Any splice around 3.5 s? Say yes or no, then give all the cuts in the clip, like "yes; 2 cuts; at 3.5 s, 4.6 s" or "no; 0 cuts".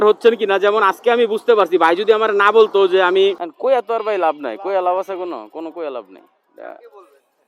yes; 1 cut; at 3.5 s